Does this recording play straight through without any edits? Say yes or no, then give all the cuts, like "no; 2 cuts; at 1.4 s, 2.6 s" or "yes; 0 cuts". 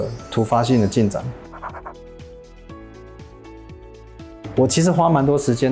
yes; 0 cuts